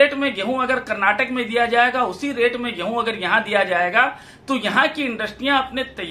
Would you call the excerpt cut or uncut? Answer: uncut